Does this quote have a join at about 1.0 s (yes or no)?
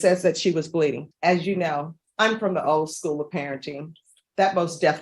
yes